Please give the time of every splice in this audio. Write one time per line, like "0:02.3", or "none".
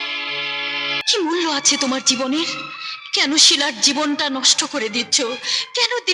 0:01.0

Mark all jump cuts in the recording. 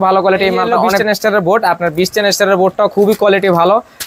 0:01.0

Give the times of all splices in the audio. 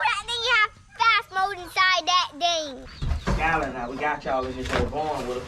0:03.0

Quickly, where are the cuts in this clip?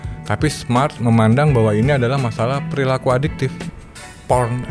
0:03.6

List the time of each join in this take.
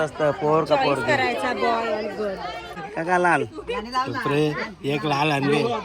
0:02.7

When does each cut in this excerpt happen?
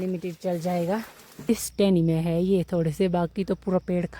0:01.5

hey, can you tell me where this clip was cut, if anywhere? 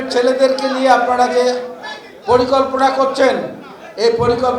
none

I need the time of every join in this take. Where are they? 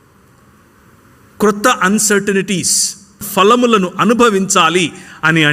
0:03.2

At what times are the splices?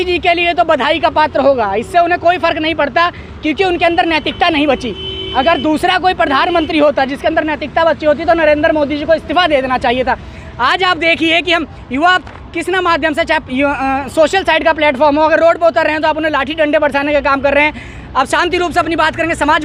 none

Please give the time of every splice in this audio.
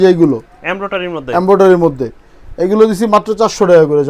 none

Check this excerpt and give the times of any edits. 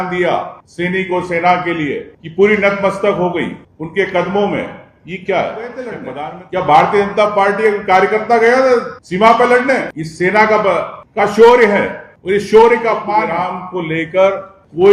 0:06.0
0:13.3

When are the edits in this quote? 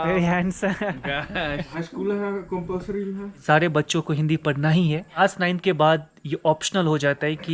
0:01.7
0:03.3
0:05.2

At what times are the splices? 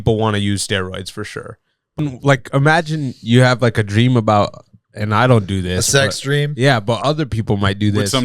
0:02.0

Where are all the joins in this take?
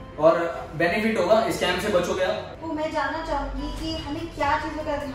0:02.5

